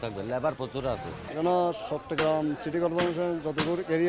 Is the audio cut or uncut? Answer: cut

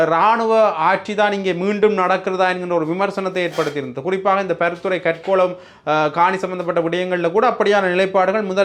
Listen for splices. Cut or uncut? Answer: uncut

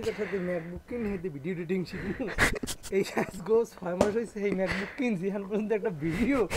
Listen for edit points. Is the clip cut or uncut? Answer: uncut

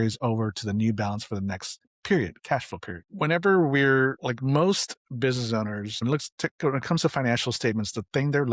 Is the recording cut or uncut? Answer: cut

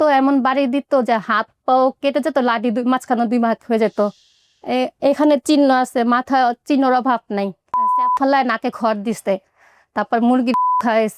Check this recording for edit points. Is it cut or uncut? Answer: cut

